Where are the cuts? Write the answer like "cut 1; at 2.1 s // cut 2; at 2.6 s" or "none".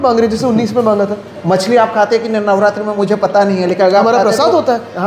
cut 1; at 1.3 s